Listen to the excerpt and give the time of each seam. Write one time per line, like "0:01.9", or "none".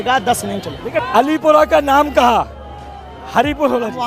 0:00.9